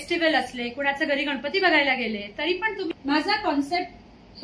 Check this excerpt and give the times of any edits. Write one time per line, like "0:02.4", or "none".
0:02.9